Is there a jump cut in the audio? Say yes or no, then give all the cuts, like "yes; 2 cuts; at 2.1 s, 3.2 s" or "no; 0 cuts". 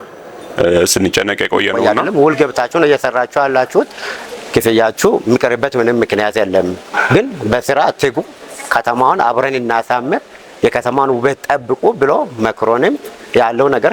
yes; 1 cut; at 1.9 s